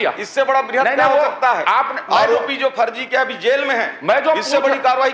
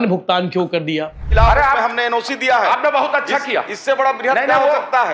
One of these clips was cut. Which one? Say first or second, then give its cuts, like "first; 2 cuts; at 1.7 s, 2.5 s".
second; 1 cut; at 1.2 s